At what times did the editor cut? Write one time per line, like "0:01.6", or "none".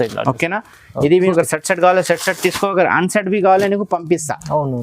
0:01.2